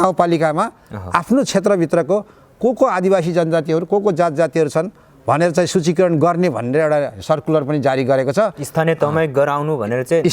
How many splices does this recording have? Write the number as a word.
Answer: zero